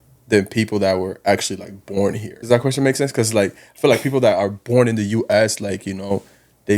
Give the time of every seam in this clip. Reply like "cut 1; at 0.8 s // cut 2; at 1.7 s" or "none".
cut 1; at 2.3 s

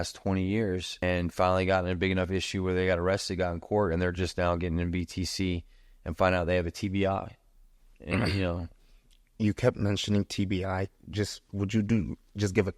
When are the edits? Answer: cut 1; at 1.0 s

